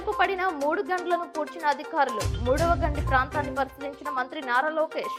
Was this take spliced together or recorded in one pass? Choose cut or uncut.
uncut